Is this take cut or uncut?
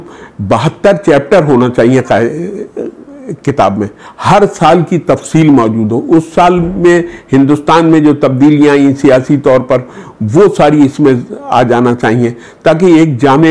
uncut